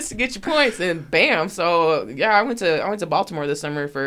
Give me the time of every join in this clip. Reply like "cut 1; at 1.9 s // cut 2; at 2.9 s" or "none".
none